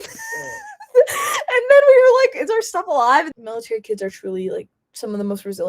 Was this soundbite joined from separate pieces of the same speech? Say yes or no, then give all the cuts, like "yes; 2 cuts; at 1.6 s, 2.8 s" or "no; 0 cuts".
yes; 1 cut; at 3.3 s